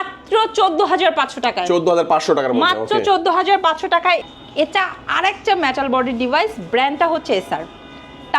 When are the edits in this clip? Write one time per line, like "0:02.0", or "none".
0:04.2

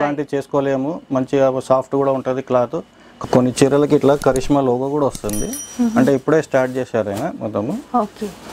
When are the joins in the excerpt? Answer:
0:03.2

